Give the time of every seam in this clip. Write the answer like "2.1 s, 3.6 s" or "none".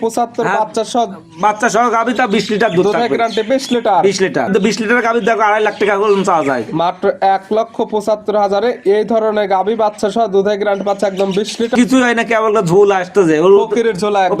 4.5 s, 11.7 s